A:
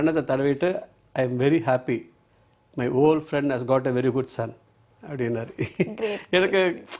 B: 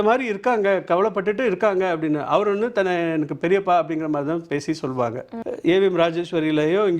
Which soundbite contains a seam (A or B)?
B